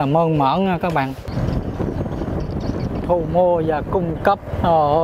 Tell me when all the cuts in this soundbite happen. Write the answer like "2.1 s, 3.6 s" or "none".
1.3 s